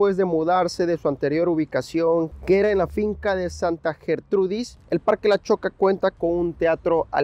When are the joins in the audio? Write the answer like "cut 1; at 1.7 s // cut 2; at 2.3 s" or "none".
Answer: none